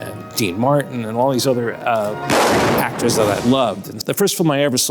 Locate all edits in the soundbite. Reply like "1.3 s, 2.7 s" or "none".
4.0 s